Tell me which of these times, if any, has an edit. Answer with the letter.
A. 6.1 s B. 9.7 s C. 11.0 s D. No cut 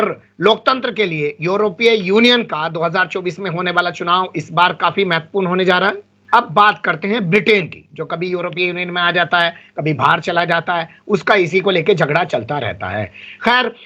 A